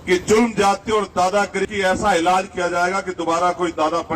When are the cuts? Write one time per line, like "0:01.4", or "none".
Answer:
0:01.7